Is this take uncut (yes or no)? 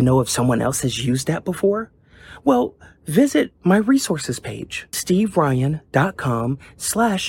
yes